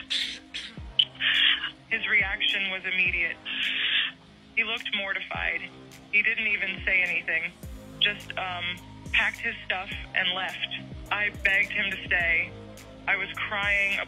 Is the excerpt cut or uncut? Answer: uncut